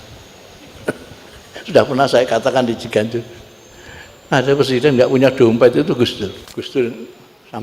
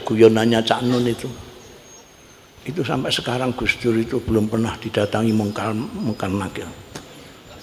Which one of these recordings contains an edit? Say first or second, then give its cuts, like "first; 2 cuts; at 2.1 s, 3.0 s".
first; 1 cut; at 6.4 s